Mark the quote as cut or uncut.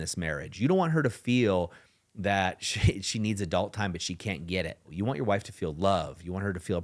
cut